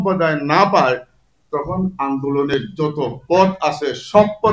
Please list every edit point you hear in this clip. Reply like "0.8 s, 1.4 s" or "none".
none